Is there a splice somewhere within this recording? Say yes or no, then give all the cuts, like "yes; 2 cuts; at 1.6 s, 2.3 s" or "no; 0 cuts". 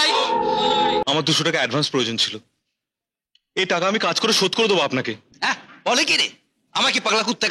yes; 1 cut; at 1.0 s